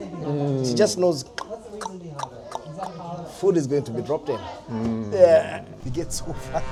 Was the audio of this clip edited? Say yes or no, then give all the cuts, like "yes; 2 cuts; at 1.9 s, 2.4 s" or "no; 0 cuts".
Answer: no; 0 cuts